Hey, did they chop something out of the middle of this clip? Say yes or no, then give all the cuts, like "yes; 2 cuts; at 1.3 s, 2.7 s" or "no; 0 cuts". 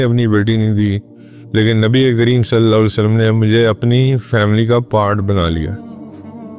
yes; 1 cut; at 5.7 s